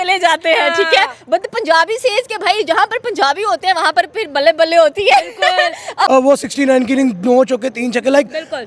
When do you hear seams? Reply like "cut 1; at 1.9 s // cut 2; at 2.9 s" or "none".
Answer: cut 1; at 6.1 s

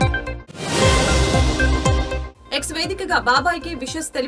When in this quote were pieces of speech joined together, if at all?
cut 1; at 2.2 s

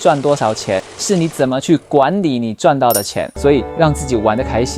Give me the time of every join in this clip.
cut 1; at 0.9 s // cut 2; at 3.2 s

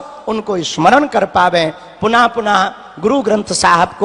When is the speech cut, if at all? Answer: none

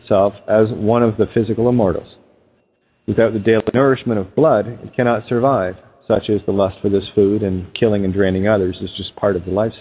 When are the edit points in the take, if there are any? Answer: cut 1; at 6.5 s

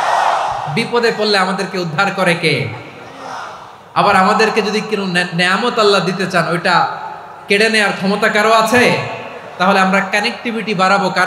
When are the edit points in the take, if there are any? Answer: none

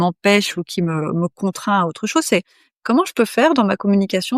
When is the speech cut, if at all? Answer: none

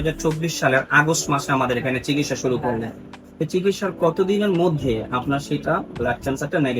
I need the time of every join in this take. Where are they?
none

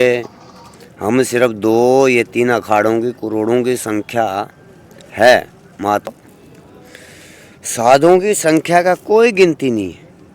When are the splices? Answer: cut 1; at 6.1 s

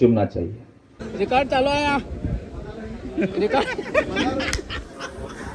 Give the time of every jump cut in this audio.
cut 1; at 0.9 s

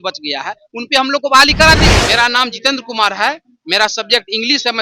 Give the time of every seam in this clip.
cut 1; at 1.9 s

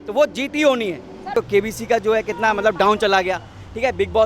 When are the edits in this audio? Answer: cut 1; at 1.3 s

